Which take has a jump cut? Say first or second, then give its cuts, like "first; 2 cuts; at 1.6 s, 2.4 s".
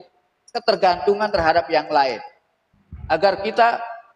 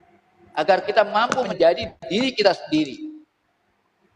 second; 1 cut; at 1.5 s